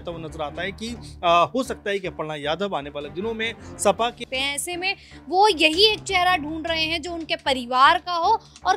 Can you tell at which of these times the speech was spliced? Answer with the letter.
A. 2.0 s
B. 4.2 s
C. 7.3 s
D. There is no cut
B